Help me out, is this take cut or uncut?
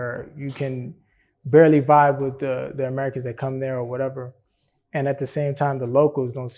uncut